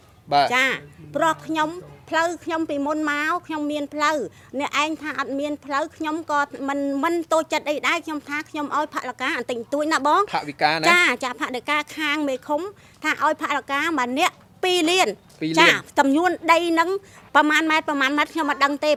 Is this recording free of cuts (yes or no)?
yes